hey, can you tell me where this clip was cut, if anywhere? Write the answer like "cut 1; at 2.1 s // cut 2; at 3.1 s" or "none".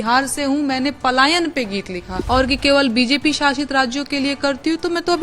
cut 1; at 2.1 s